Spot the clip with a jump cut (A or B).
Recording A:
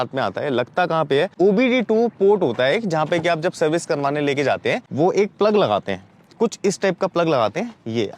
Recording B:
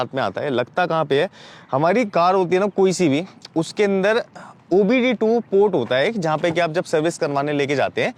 A